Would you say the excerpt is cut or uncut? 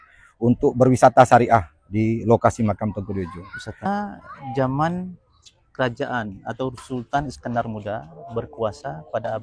cut